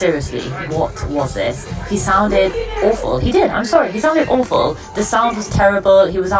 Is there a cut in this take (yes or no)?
no